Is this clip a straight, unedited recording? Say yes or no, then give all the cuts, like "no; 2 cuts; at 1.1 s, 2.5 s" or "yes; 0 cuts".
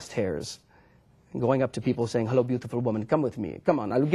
no; 1 cut; at 2.5 s